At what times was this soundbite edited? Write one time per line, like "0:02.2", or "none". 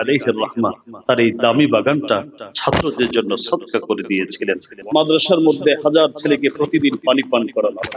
0:04.7

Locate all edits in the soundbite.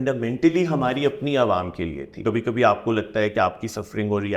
0:02.2

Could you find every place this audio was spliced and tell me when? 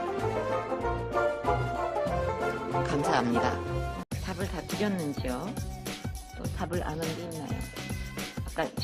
0:07.6

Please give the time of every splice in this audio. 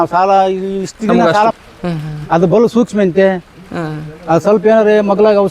0:01.5

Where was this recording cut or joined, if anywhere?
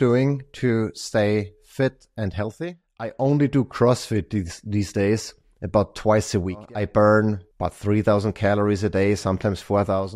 0:03.1
0:06.7
0:07.5

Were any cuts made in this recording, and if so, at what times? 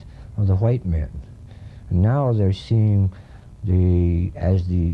0:01.1

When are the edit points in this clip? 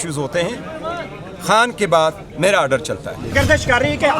0:03.3

